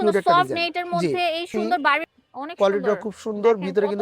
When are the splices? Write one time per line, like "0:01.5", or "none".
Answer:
0:02.1